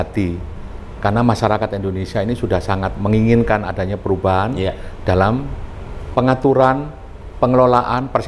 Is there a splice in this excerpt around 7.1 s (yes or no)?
no